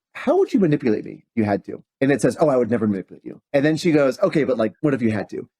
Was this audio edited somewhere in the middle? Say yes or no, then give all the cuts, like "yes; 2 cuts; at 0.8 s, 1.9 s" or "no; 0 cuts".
yes; 3 cuts; at 1.8 s, 3.4 s, 4.7 s